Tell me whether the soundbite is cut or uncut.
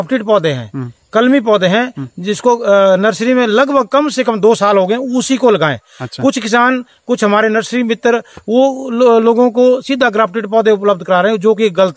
uncut